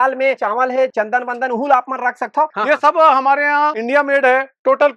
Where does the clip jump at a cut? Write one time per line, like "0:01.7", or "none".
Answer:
0:02.6